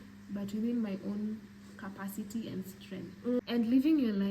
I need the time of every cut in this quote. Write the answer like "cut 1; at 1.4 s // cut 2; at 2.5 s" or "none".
cut 1; at 3.4 s